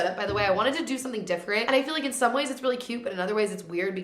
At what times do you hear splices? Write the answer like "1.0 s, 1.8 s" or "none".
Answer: 1.6 s